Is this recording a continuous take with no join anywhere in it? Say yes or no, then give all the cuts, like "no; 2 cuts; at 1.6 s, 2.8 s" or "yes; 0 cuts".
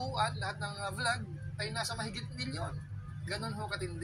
yes; 0 cuts